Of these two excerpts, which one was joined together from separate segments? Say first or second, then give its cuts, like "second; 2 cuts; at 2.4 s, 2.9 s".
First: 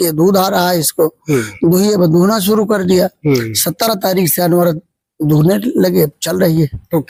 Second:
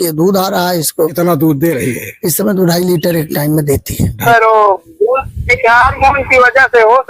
second; 2 cuts; at 1.1 s, 4.2 s